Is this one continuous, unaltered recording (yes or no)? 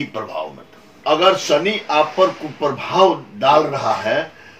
no